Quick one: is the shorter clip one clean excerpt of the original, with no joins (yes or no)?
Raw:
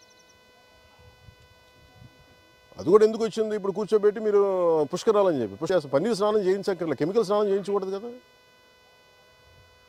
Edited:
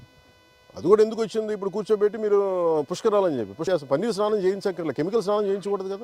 yes